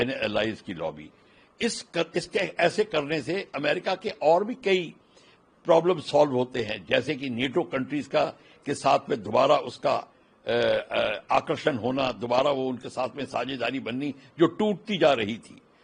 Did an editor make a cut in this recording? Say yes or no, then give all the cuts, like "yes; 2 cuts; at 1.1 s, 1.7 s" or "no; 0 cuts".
no; 0 cuts